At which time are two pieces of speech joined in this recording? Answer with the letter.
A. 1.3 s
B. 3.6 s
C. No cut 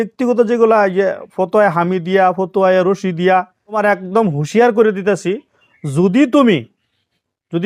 B